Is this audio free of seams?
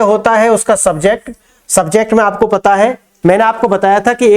no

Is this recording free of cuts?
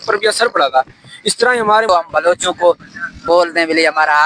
no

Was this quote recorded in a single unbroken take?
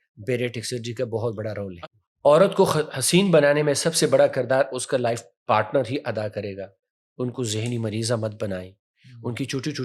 no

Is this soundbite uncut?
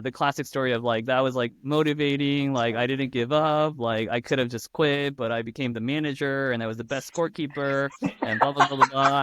yes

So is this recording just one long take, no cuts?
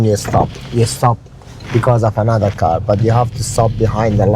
yes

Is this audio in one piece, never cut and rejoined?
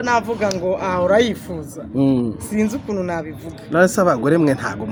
yes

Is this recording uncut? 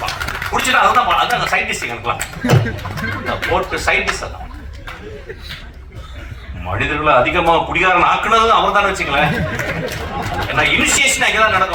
yes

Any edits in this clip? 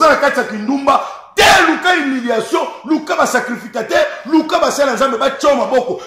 no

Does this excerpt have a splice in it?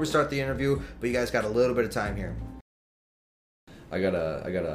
yes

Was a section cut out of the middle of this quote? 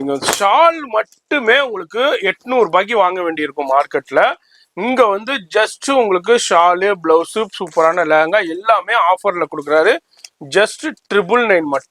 no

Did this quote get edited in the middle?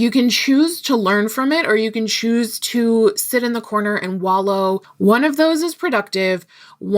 yes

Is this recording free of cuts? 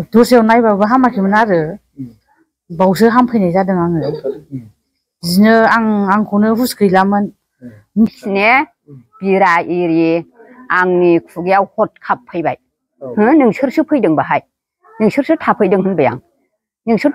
no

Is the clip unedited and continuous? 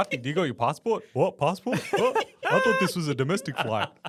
yes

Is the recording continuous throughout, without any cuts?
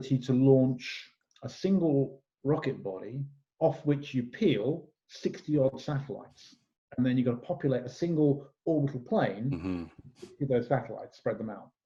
yes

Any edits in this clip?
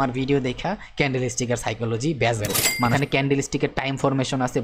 yes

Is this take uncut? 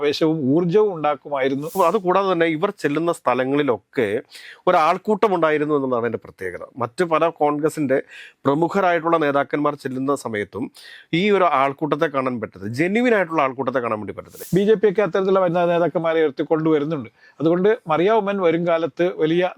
no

